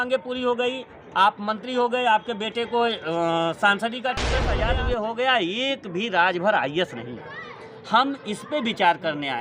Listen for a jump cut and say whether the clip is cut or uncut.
cut